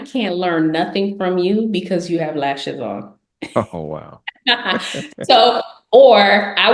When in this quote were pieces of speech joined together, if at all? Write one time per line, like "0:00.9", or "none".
none